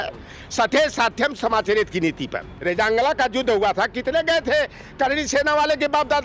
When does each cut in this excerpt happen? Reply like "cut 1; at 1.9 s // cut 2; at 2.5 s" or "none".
cut 1; at 2.5 s